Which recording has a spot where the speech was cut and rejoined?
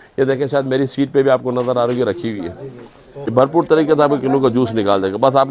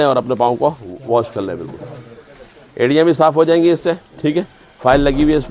first; 1 cut; at 3.3 s

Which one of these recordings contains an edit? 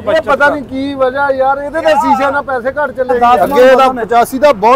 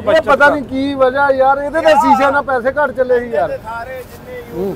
first; 1 cut; at 3.2 s

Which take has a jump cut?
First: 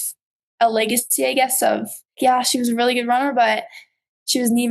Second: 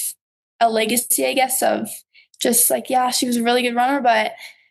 first; 1 cut; at 2.2 s

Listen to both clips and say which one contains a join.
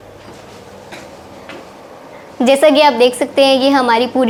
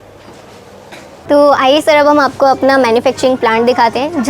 second; 1 cut; at 1.1 s

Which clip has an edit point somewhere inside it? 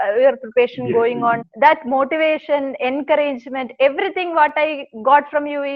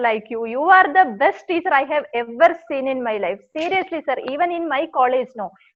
first; 1 cut; at 1.5 s

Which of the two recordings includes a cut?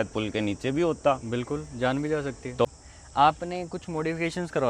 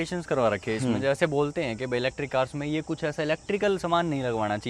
first; 1 cut; at 2.6 s

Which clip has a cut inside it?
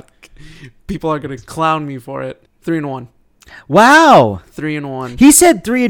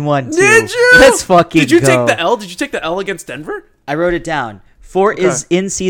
first; 1 cut; at 2.5 s

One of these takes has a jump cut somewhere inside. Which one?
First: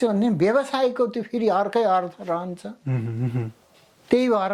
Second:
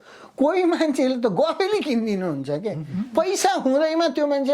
second; 1 cut; at 2.9 s

